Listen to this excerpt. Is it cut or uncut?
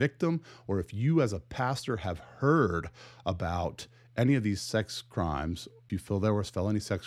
cut